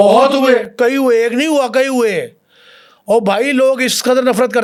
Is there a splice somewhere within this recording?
no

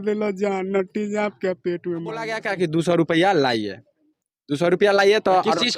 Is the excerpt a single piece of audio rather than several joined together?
no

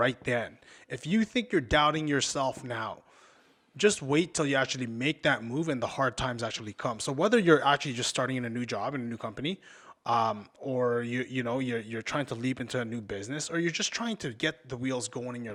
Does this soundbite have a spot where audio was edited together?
no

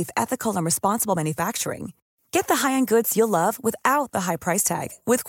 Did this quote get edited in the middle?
no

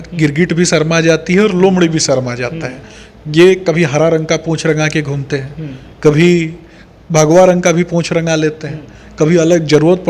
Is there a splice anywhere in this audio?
no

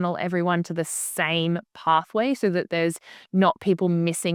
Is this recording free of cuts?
yes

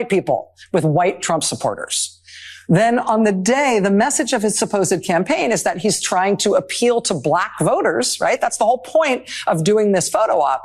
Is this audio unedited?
yes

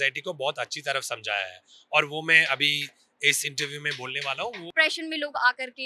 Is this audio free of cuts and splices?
no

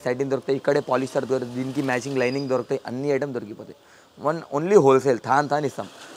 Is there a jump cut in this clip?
no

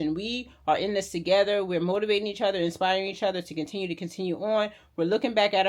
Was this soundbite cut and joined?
no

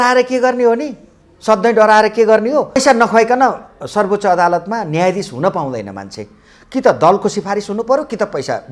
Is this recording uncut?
no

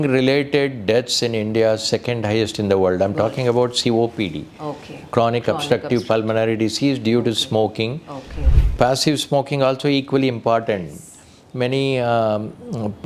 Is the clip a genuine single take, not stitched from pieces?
yes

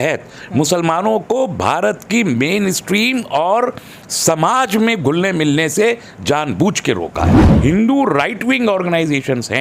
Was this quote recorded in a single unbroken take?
no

